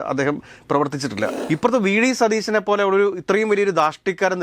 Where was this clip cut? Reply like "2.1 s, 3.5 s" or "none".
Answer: 1.4 s